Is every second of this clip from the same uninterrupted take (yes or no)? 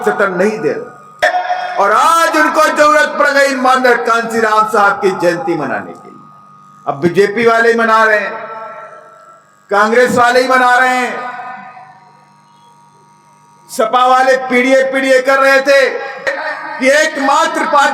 no